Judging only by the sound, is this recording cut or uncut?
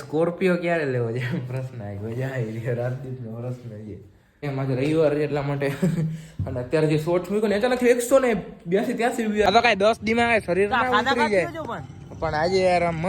cut